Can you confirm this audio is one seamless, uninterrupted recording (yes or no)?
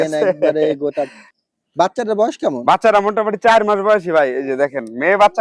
no